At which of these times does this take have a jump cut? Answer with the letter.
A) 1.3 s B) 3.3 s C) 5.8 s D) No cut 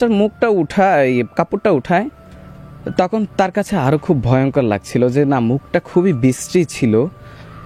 D